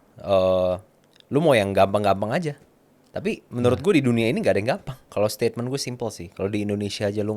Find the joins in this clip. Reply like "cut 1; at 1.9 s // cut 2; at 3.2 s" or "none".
cut 1; at 5.0 s